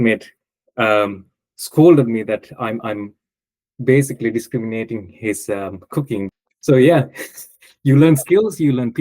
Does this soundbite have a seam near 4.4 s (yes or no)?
no